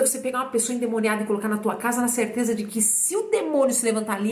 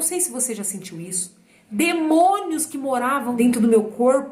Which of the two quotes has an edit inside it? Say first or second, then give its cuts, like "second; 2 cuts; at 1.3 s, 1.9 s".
second; 2 cuts; at 1.3 s, 3.4 s